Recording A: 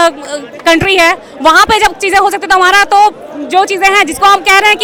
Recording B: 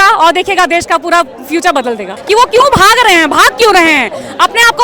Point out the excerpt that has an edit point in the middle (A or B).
B